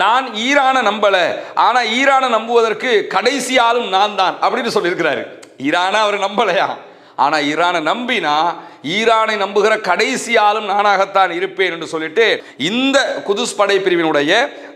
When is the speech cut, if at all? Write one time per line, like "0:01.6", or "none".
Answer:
0:12.5